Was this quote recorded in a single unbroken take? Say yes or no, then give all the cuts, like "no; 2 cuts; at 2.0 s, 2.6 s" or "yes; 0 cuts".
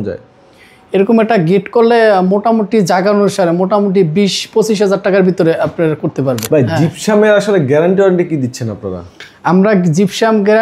no; 1 cut; at 6.4 s